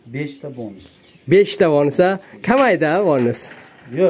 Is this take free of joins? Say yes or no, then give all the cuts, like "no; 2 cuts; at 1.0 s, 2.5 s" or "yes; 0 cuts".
yes; 0 cuts